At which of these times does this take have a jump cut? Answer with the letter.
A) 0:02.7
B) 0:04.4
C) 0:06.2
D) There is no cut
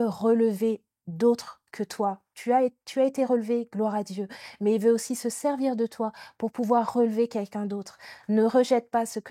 D